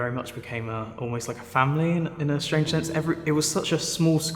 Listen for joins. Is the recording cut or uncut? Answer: uncut